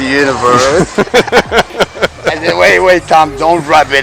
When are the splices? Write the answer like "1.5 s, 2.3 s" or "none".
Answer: none